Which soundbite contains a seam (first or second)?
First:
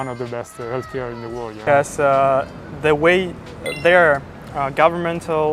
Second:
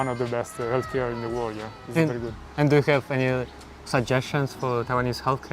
first